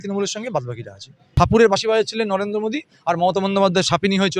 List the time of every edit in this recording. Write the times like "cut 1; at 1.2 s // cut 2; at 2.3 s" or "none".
cut 1; at 1.4 s